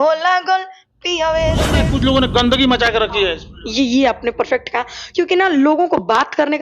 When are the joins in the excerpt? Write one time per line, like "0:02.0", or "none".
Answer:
0:01.8